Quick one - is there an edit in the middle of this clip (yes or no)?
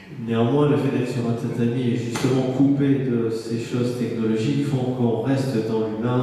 no